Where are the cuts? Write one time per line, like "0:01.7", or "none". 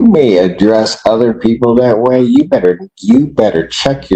none